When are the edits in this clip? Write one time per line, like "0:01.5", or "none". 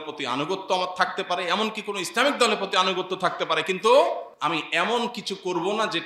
0:04.3